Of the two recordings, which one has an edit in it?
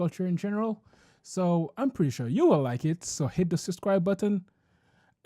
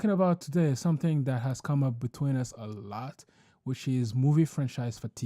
first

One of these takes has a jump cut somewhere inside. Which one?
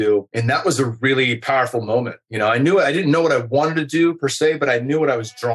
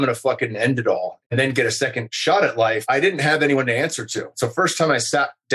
second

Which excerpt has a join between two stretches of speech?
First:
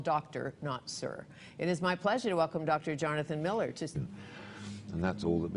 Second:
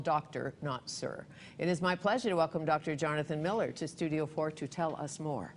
second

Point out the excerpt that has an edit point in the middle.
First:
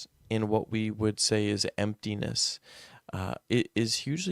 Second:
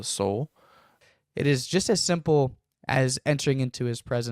second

